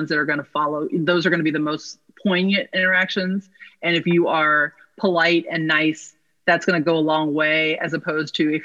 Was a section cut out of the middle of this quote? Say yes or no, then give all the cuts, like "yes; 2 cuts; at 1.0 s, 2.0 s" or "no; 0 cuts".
no; 0 cuts